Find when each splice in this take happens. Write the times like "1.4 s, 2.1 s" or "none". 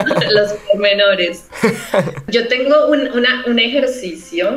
2.2 s